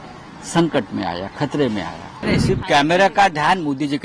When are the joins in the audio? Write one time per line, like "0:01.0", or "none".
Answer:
0:02.2